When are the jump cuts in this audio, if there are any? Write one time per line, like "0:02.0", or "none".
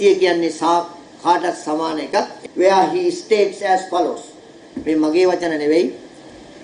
0:02.3